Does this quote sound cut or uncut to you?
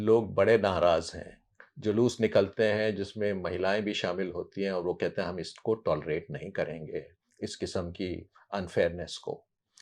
uncut